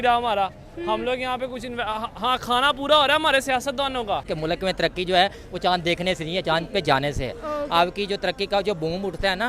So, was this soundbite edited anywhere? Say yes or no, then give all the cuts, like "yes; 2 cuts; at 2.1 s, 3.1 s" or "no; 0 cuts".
yes; 1 cut; at 4.3 s